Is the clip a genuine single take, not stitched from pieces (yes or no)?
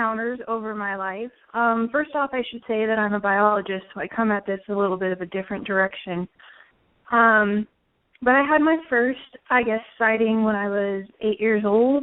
no